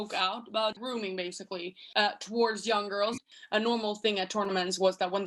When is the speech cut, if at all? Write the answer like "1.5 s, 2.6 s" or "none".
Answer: 1.4 s, 3.2 s